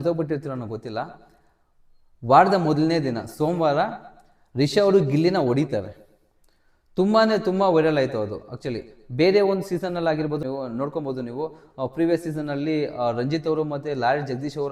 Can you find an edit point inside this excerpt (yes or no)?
no